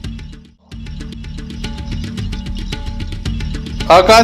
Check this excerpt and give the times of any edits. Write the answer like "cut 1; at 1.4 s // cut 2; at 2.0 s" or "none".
cut 1; at 1.0 s